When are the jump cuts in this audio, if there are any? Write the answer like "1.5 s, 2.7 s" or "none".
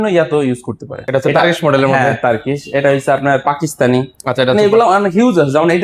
1.0 s